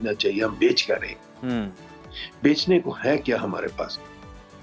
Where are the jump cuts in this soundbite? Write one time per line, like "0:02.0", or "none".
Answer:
none